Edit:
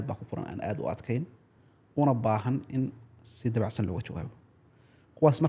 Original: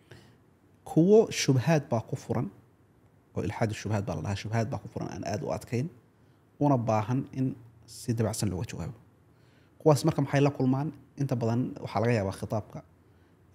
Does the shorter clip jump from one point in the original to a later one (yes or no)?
no